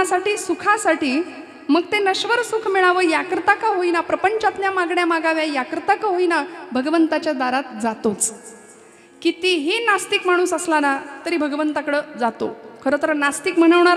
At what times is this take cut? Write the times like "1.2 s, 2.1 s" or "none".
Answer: none